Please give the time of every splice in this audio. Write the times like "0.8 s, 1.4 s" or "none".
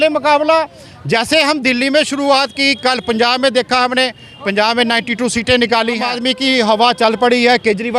6.1 s

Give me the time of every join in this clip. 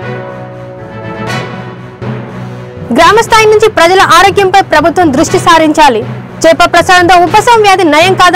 1.6 s

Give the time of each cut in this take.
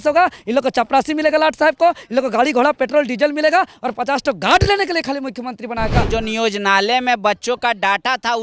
6.1 s

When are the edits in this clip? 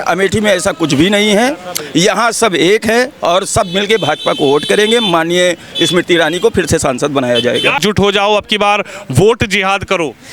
7.8 s

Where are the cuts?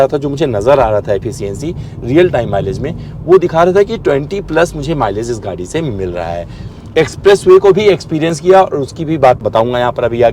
6.7 s, 9.4 s

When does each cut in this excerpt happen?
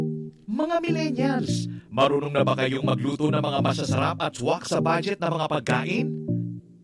none

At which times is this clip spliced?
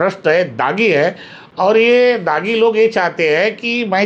none

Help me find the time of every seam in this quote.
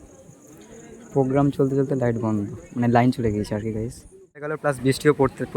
4.5 s

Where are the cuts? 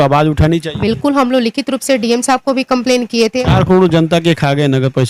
3.4 s

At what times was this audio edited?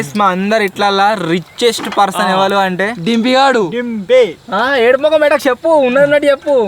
none

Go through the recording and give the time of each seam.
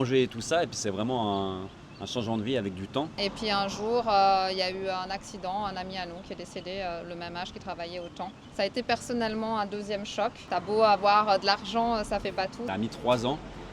3.1 s, 8.4 s, 10.4 s, 12.7 s

